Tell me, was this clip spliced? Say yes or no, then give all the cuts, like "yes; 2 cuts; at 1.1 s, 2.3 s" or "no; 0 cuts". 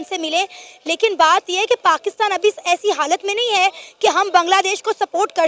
no; 0 cuts